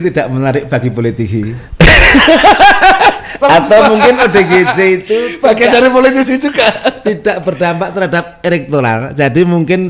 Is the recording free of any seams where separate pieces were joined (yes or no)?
yes